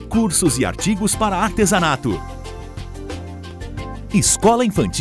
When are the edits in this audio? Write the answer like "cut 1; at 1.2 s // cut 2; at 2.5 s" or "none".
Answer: cut 1; at 4.1 s